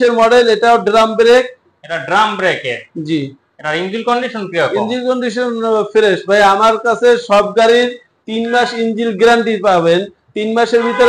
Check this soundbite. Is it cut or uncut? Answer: uncut